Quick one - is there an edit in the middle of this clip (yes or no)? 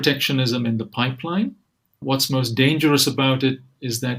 yes